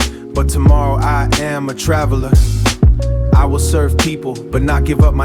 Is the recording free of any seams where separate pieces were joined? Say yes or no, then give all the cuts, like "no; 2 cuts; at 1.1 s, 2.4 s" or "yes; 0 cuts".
yes; 0 cuts